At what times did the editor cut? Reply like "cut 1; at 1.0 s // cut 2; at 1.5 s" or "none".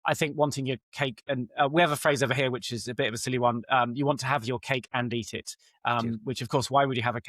none